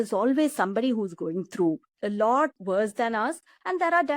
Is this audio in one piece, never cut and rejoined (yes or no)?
no